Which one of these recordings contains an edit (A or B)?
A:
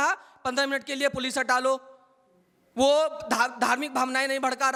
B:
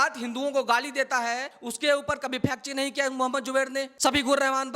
B